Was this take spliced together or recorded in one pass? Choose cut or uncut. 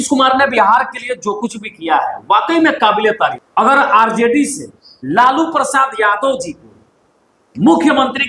cut